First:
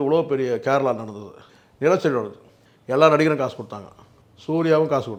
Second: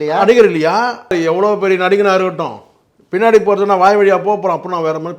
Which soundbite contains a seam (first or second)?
second